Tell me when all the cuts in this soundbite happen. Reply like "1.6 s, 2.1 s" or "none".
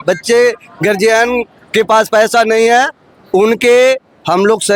none